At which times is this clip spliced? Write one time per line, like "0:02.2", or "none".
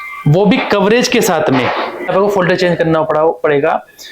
0:02.1